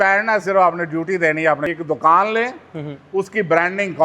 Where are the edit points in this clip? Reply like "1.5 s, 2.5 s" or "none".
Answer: 1.7 s